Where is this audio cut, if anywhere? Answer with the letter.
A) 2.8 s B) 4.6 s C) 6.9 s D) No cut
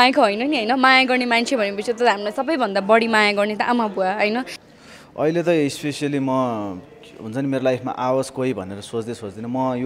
B